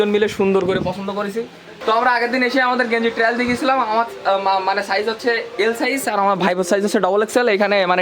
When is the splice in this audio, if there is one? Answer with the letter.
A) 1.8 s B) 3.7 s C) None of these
A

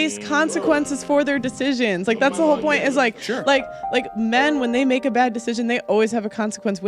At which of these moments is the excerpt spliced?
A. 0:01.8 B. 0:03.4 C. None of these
B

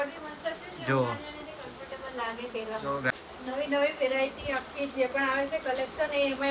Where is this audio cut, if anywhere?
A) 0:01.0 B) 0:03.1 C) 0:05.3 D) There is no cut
B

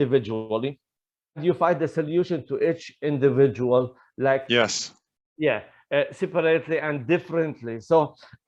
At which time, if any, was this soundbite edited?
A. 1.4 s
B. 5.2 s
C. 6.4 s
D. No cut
A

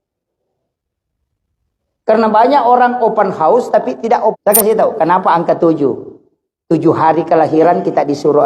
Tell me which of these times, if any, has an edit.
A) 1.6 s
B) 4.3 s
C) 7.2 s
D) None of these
B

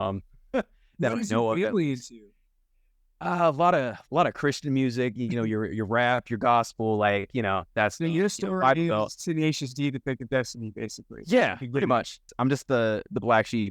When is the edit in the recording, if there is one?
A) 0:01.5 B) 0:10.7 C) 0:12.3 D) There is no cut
C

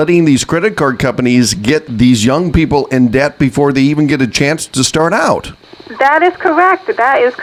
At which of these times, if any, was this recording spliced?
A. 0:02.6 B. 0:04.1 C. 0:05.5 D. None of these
D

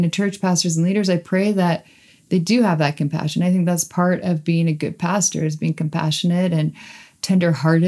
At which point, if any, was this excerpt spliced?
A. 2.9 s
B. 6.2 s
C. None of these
C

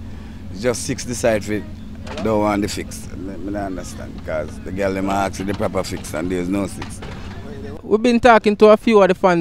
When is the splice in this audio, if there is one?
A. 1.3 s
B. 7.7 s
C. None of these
B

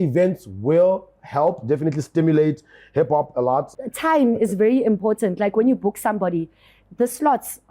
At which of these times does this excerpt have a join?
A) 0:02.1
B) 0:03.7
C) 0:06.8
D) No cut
B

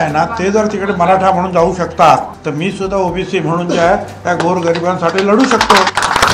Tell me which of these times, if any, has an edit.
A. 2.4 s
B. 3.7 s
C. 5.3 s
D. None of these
A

